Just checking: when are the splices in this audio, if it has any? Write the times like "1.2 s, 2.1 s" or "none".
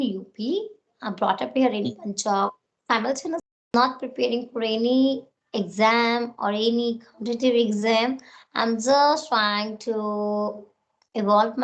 3.5 s